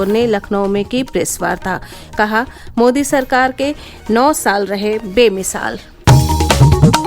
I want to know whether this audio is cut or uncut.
cut